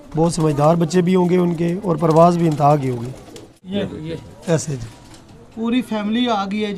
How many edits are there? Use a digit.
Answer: 1